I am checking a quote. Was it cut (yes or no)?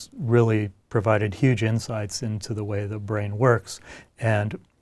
no